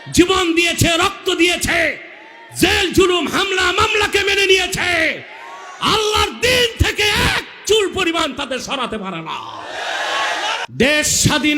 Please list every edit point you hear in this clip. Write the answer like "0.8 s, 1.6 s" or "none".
10.6 s